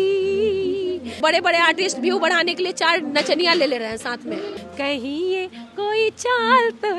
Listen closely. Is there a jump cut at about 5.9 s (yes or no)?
no